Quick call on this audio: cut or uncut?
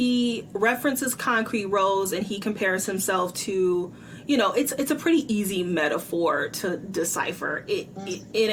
uncut